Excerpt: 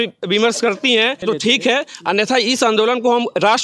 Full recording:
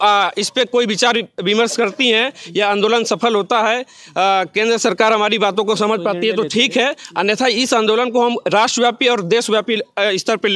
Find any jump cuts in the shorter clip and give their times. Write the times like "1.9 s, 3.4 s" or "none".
1.2 s